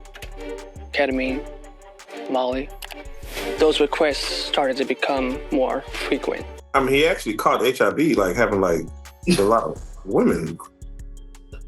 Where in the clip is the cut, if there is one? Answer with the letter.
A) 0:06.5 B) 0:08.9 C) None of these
A